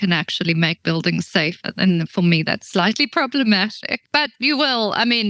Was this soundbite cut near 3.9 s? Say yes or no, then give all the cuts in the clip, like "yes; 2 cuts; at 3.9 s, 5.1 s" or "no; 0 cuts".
yes; 1 cut; at 3.9 s